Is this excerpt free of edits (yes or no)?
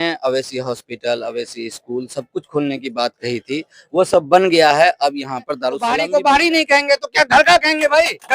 no